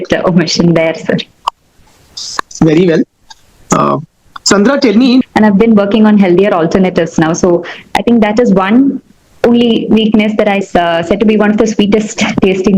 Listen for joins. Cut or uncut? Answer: cut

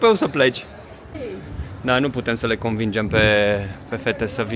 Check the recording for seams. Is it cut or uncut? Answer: cut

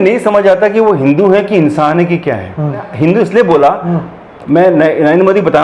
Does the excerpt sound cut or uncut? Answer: cut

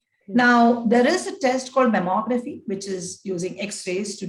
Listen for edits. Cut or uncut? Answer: uncut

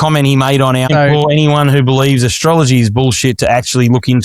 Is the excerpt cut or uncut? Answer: cut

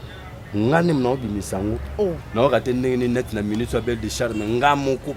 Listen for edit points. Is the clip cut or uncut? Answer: cut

